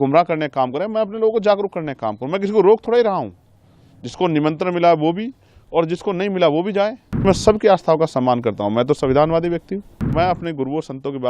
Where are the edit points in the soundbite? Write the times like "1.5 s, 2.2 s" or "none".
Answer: 7.3 s, 10.0 s